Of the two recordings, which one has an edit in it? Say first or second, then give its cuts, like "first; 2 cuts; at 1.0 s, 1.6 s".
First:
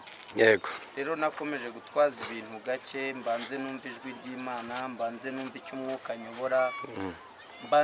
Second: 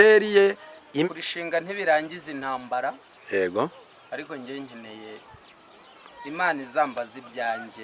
second; 1 cut; at 1.1 s